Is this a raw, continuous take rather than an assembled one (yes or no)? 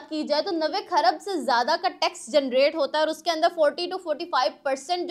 yes